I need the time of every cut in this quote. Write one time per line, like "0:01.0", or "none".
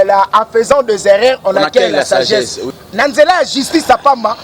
0:02.7